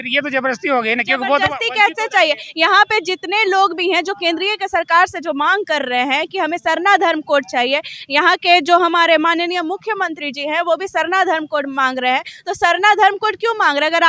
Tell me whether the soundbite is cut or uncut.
uncut